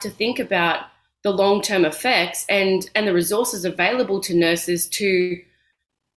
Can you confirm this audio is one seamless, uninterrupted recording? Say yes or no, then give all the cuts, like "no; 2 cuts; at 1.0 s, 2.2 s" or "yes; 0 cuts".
yes; 0 cuts